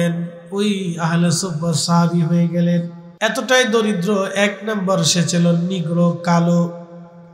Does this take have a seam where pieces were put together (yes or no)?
yes